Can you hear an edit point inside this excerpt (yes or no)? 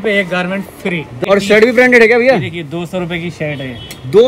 yes